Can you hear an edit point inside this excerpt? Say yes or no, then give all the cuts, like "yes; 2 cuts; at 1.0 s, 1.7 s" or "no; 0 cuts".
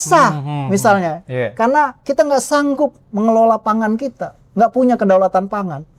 no; 0 cuts